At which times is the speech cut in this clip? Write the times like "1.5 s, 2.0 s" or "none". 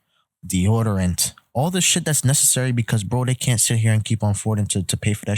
none